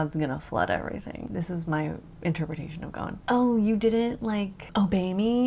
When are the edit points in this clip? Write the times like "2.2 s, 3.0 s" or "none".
1.2 s, 3.2 s, 4.6 s